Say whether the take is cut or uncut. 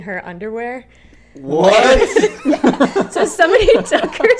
uncut